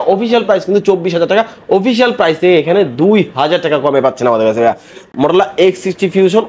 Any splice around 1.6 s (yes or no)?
no